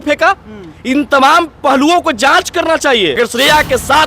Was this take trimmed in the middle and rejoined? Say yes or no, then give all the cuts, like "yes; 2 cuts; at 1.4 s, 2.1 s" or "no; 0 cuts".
yes; 1 cut; at 3.2 s